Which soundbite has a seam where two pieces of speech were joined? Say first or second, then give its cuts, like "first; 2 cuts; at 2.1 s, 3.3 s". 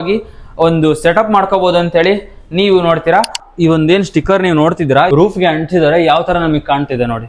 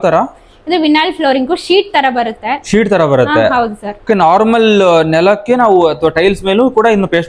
first; 2 cuts; at 3.4 s, 5.1 s